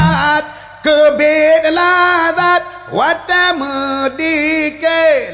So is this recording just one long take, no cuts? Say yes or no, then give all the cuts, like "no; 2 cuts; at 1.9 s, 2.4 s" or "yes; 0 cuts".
yes; 0 cuts